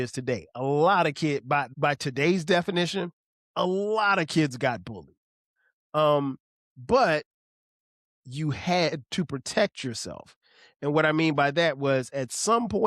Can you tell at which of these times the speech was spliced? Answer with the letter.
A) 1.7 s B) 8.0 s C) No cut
A